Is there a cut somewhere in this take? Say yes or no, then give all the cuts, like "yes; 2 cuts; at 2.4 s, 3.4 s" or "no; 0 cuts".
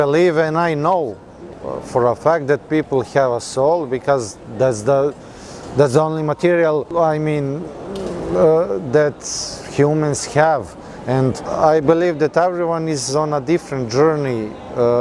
no; 0 cuts